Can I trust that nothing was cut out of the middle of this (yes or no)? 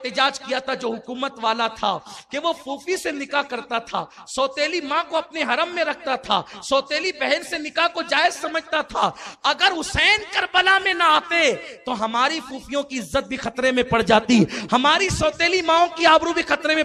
yes